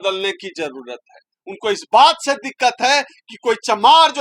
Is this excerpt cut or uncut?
cut